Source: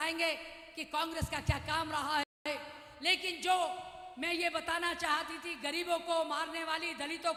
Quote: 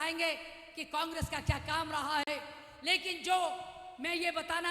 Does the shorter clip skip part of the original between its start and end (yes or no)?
yes